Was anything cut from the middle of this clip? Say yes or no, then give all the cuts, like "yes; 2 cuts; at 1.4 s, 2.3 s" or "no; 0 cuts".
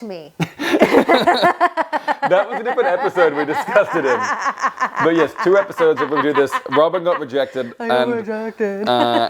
no; 0 cuts